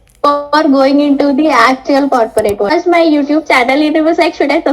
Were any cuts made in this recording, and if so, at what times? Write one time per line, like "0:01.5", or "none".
0:02.7